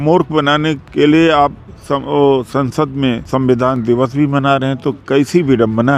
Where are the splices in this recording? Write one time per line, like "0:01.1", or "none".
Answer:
0:00.8
0:03.2
0:05.0